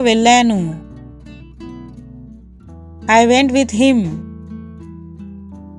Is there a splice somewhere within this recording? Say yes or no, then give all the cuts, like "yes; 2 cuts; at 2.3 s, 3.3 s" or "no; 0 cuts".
yes; 3 cuts; at 0.7 s, 3.1 s, 4.8 s